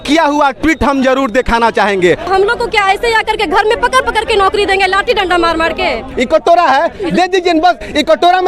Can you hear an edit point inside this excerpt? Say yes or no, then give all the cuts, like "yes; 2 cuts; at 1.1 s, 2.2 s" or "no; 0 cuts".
yes; 2 cuts; at 2.2 s, 6.1 s